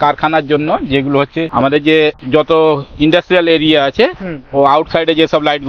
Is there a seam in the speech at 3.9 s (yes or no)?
no